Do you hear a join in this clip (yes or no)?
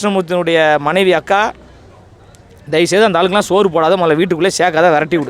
no